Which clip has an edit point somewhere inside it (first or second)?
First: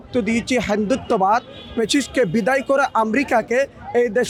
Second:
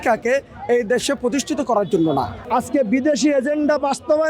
second